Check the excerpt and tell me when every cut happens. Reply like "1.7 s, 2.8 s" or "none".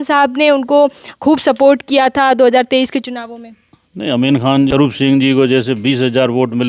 4.7 s